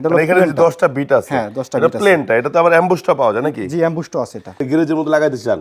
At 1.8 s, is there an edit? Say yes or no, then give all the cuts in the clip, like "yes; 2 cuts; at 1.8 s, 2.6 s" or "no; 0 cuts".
no; 1 cut; at 4.6 s